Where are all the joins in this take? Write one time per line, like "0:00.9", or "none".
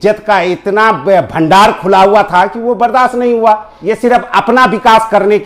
0:03.7